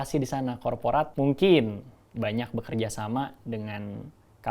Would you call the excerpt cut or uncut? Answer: cut